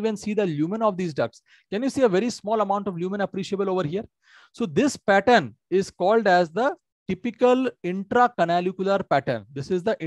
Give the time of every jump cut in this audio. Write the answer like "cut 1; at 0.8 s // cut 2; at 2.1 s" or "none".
none